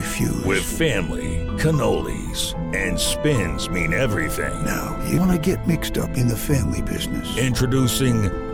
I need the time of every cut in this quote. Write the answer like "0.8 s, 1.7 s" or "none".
none